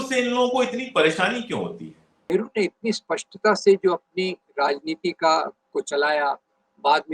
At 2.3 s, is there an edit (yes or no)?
yes